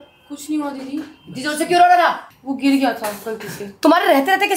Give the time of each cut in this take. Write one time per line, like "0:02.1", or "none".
none